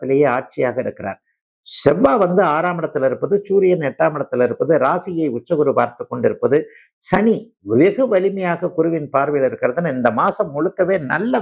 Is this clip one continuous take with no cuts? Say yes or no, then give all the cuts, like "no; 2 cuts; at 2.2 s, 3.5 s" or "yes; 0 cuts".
yes; 0 cuts